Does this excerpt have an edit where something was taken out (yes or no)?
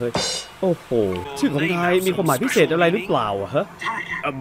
yes